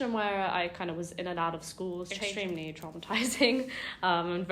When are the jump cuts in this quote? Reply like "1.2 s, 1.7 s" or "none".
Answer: 2.2 s